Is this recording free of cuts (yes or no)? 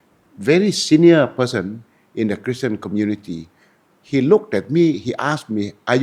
yes